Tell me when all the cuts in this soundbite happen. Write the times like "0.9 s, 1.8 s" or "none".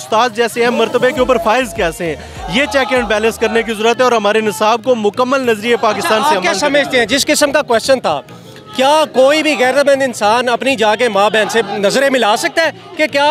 none